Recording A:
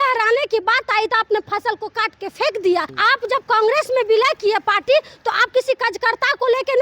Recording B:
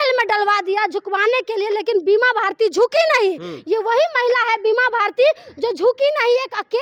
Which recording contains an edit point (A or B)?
A